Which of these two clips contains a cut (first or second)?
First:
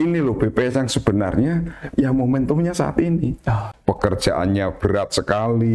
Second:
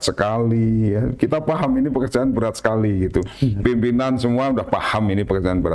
first